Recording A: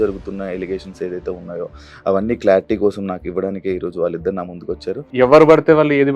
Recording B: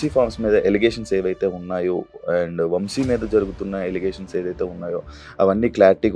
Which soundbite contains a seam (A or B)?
A